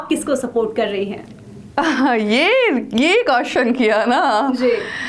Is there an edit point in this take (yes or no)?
no